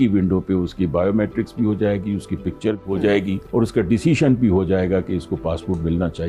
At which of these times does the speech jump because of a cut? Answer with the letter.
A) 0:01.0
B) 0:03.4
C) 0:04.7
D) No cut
B